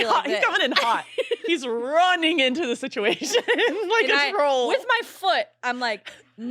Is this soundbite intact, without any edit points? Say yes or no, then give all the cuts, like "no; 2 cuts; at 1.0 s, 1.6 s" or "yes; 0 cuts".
yes; 0 cuts